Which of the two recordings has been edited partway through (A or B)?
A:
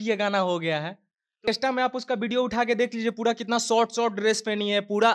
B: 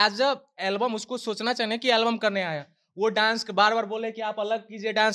A